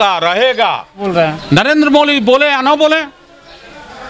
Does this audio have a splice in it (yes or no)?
yes